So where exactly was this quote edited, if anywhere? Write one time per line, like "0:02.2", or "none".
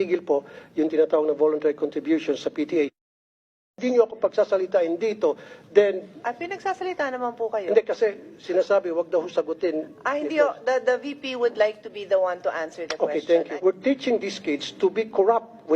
0:03.8